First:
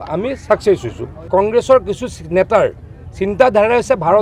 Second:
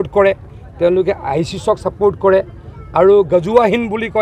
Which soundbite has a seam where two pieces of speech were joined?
first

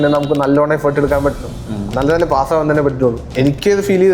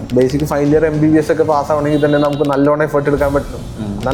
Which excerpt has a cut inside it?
first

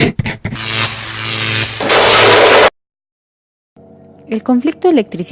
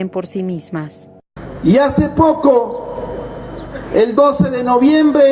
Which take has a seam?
second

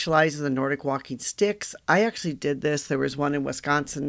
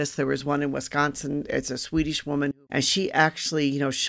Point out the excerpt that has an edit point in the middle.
second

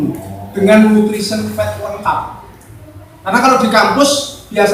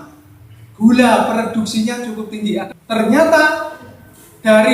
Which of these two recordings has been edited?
second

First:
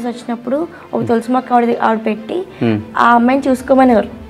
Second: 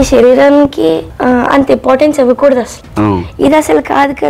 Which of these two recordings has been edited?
second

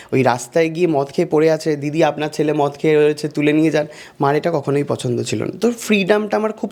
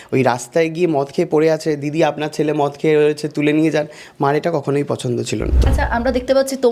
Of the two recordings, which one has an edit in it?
second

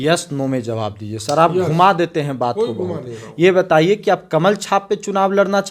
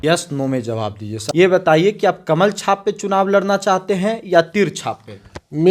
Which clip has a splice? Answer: second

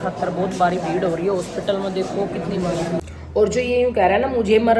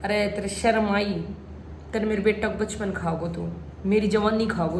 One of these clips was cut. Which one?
first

